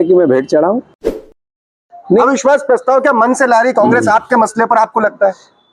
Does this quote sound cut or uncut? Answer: cut